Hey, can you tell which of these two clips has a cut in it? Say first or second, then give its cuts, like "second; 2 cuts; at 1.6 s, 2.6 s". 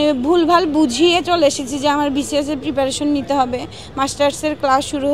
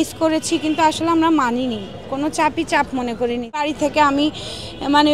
second; 1 cut; at 3.6 s